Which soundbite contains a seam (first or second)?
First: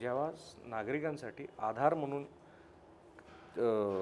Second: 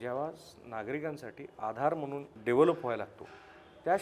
second